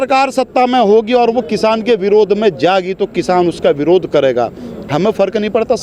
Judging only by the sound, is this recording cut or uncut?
uncut